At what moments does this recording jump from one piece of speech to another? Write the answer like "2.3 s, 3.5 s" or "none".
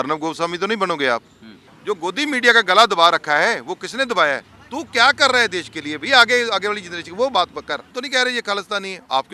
1.7 s, 4.5 s, 8.0 s